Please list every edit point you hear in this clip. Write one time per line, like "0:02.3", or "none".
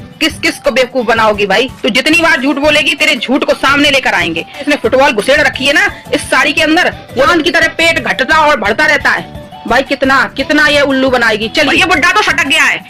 0:01.7
0:04.6
0:07.3
0:11.7

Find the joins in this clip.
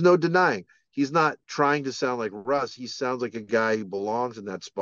0:01.4

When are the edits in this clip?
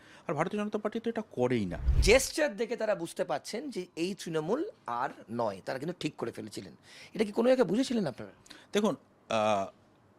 0:01.8

